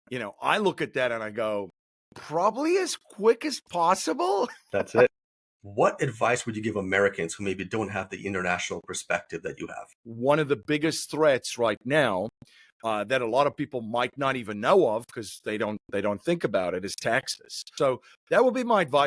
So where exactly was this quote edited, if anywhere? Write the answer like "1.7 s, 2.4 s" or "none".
5.1 s, 10.1 s, 17.7 s